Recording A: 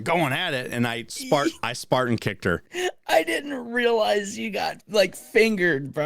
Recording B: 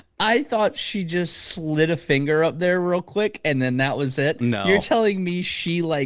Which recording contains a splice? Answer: A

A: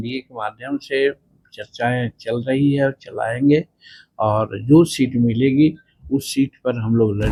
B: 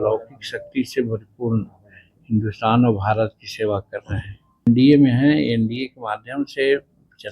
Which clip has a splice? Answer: B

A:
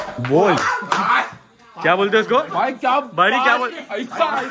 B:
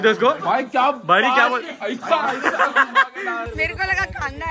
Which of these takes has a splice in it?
B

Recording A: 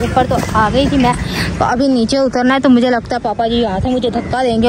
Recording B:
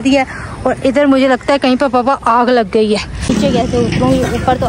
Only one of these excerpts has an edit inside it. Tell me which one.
B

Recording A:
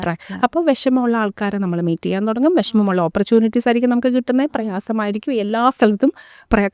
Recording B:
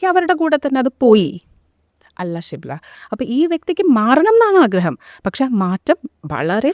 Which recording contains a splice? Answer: B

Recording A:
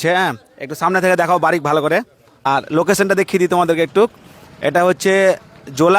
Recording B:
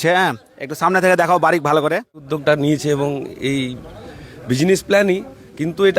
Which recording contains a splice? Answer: B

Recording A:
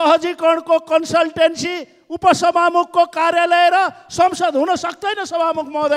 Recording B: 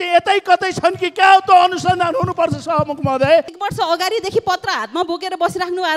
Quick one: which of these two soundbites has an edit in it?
B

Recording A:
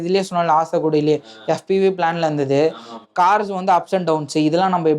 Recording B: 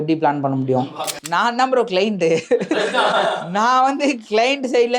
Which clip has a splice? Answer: B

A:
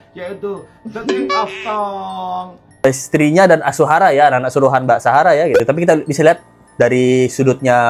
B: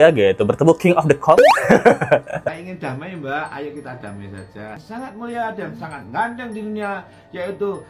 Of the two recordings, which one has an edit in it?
A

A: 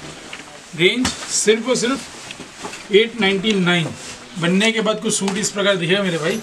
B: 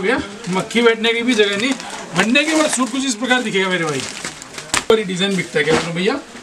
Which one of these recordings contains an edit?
B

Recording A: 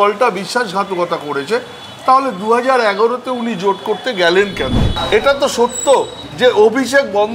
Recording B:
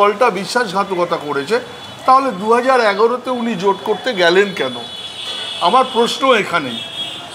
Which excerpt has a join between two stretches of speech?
A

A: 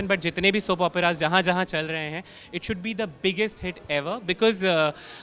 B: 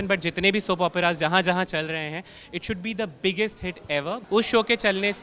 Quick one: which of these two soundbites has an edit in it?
B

